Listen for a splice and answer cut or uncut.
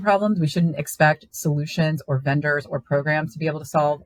uncut